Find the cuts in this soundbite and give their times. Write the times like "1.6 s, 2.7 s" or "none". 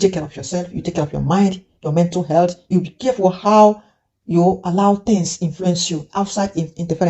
2.7 s